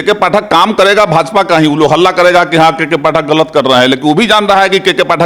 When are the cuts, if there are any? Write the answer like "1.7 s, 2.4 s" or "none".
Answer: none